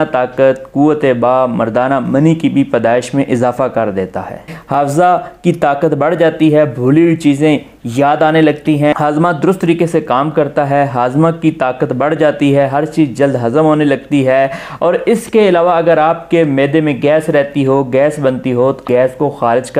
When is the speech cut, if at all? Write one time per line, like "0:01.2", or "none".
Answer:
0:04.6
0:08.9
0:18.8